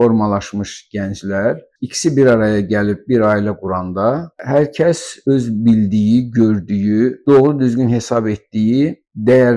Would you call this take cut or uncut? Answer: uncut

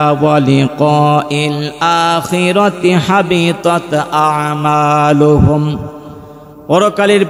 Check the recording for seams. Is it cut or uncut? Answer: uncut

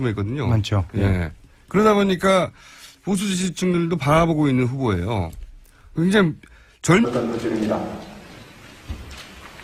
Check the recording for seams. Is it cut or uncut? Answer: uncut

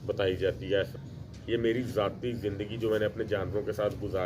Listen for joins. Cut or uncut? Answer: cut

